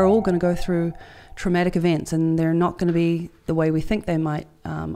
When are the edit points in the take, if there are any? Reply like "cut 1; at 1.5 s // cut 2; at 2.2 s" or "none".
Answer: none